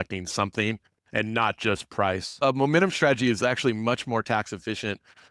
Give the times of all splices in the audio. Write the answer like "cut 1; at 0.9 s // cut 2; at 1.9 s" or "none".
cut 1; at 2.4 s